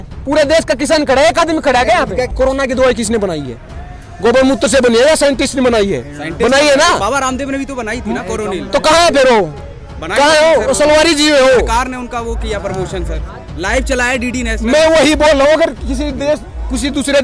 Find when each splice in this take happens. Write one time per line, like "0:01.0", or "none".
0:02.3